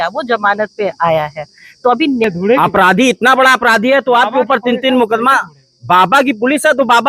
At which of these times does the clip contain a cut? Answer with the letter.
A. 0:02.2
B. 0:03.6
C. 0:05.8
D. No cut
A